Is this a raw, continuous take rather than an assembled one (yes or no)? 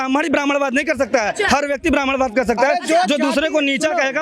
yes